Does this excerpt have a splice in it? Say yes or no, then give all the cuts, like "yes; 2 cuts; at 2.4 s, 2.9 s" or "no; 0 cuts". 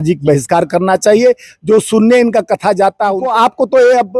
yes; 1 cut; at 3.2 s